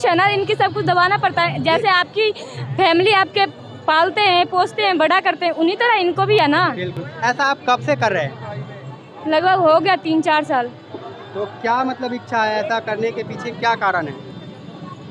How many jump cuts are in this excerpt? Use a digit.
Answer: 0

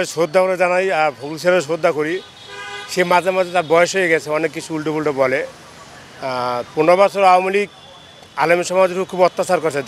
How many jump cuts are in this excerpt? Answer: 0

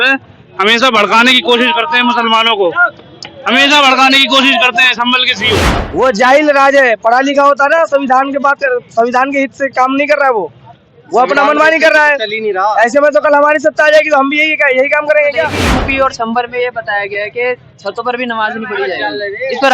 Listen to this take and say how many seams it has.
2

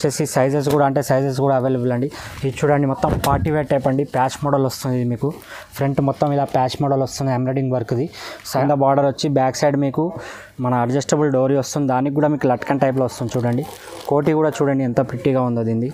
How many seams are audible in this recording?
1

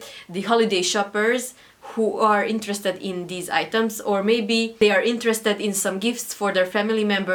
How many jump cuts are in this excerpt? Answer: 0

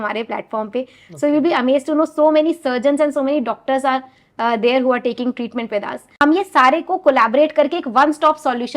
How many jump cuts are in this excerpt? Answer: 1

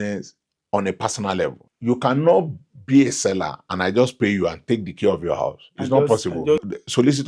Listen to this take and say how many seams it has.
2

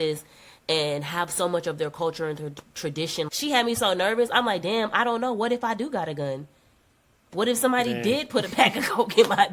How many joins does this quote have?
1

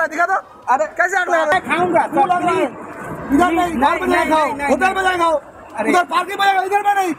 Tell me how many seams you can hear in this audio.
0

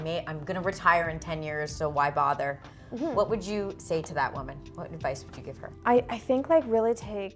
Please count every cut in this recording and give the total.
1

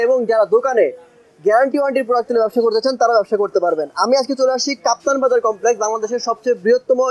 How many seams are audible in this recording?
0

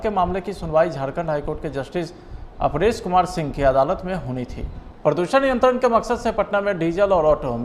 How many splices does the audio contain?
1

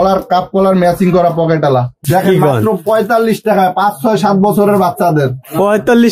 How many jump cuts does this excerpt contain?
1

